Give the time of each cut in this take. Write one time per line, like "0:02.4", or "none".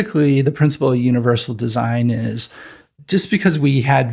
none